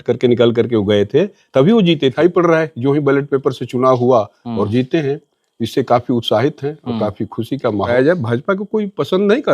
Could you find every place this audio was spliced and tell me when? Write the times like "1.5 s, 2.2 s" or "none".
2.1 s, 7.9 s